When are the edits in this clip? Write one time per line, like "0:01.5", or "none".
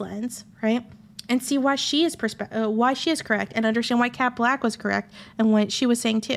none